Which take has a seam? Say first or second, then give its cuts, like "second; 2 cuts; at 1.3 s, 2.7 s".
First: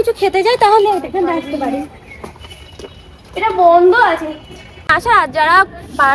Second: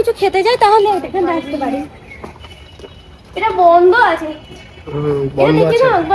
first; 1 cut; at 5.0 s